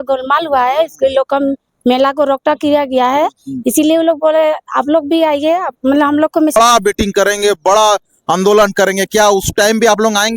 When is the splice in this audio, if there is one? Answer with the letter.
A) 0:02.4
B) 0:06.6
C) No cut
B